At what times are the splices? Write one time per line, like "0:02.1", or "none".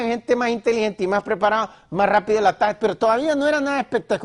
0:03.0